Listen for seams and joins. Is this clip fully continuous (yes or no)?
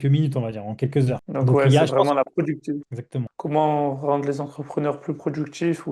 yes